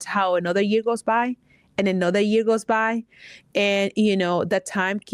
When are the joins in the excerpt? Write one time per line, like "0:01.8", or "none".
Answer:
none